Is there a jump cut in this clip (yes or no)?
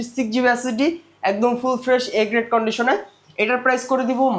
no